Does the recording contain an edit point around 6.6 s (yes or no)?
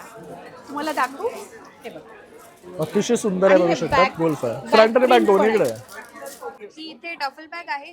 yes